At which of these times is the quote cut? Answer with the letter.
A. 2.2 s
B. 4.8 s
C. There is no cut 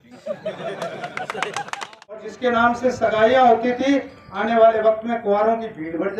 A